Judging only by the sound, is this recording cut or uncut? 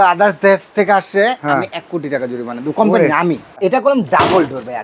cut